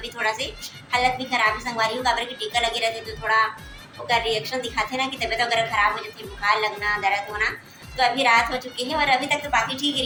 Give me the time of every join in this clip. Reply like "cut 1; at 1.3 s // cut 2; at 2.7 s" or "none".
none